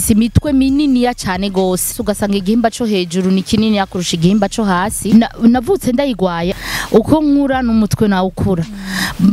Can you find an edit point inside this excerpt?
yes; 3 cuts; at 2.0 s, 5.1 s, 6.5 s

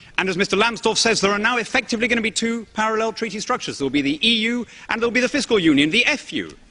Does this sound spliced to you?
no; 0 cuts

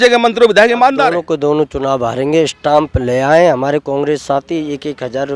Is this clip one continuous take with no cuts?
no; 1 cut; at 1.0 s

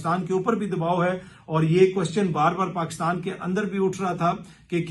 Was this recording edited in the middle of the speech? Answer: no; 0 cuts

